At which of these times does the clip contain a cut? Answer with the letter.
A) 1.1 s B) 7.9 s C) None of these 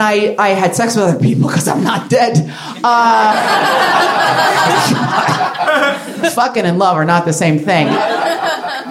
B